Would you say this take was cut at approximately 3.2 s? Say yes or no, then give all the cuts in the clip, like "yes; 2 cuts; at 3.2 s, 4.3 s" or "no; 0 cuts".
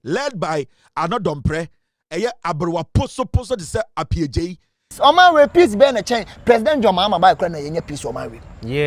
no; 1 cut; at 4.9 s